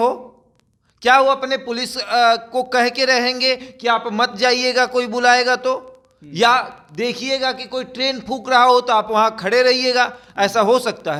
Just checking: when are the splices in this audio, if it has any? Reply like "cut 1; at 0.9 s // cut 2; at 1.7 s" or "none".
none

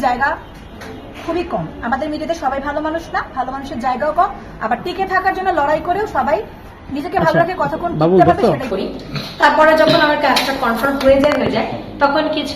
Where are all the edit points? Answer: cut 1; at 8.7 s

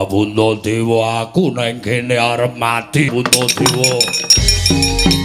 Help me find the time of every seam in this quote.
cut 1; at 3.1 s

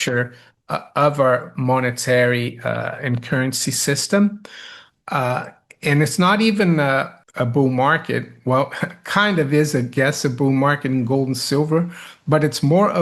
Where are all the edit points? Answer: cut 1; at 7.2 s

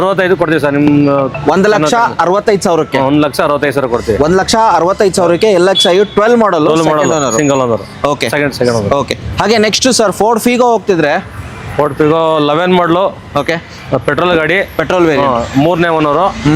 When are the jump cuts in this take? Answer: none

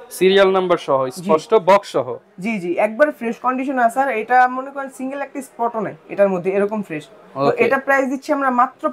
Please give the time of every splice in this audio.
none

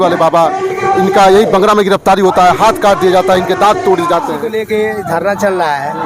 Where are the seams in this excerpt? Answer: cut 1; at 4.5 s

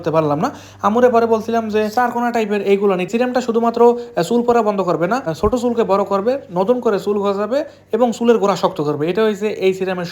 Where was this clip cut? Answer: cut 1; at 3.1 s // cut 2; at 5.3 s

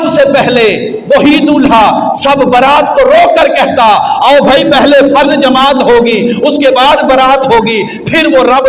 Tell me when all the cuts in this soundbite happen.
none

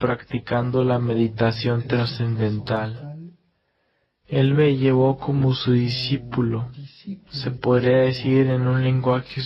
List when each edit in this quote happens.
none

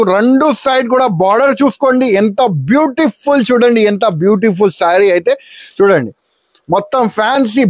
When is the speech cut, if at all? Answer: none

